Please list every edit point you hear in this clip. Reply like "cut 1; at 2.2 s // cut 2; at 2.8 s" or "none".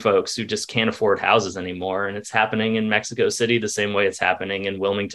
none